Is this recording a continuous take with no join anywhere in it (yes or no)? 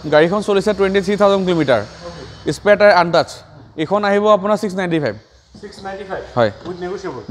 yes